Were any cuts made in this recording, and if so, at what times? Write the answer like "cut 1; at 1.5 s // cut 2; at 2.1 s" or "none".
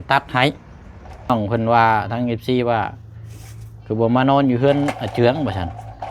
cut 1; at 1.3 s